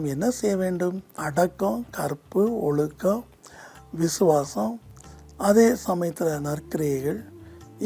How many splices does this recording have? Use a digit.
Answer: 1